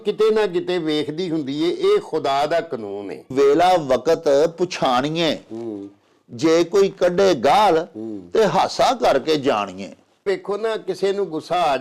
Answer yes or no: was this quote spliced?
yes